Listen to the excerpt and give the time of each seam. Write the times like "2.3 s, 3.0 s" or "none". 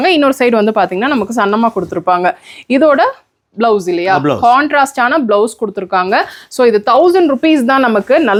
none